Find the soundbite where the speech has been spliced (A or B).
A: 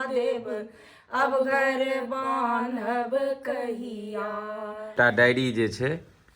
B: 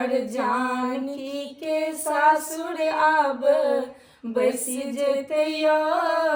A